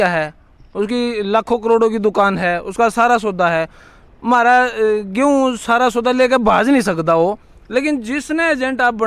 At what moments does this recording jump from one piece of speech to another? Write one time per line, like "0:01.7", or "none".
none